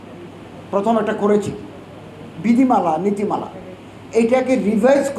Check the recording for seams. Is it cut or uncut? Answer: uncut